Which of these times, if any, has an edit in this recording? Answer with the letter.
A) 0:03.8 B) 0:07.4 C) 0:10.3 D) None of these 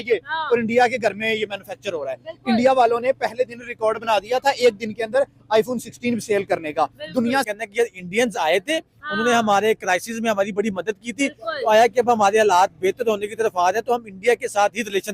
B